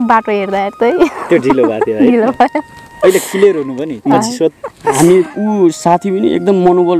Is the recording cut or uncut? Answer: cut